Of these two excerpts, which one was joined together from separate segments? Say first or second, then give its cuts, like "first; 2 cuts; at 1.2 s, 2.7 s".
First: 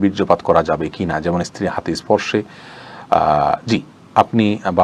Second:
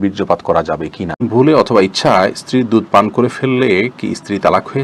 second; 1 cut; at 1.3 s